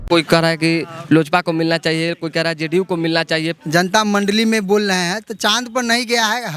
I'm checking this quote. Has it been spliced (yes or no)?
yes